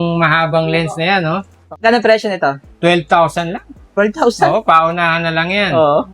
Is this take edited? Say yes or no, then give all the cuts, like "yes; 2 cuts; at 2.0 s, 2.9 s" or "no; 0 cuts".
yes; 1 cut; at 1.6 s